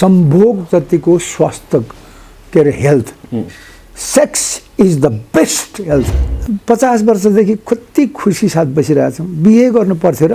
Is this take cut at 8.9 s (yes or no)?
no